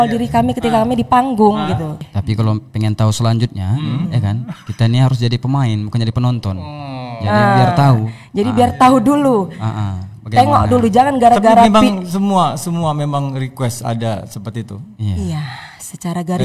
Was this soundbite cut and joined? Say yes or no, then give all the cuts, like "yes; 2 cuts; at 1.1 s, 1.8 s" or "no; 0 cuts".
yes; 1 cut; at 2.1 s